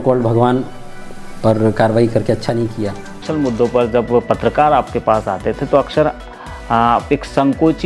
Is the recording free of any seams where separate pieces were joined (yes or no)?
no